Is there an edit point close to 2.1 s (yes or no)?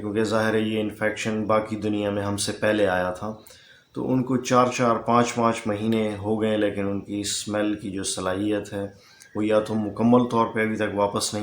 no